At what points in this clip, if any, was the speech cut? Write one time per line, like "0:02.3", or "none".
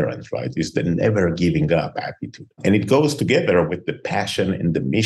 none